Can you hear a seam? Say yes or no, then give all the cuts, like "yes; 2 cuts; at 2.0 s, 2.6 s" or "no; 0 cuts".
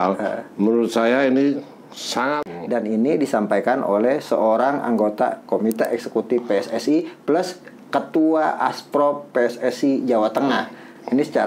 yes; 1 cut; at 2.4 s